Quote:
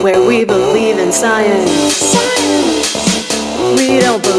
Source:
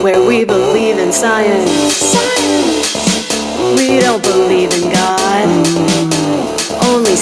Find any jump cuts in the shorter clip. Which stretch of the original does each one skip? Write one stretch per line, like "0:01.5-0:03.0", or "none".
none